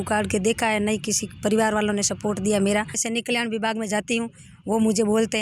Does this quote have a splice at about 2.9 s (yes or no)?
yes